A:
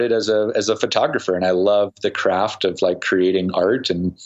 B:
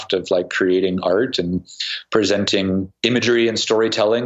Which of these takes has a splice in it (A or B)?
B